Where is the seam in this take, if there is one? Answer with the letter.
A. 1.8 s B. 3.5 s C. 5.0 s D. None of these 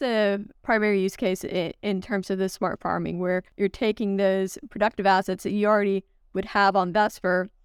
B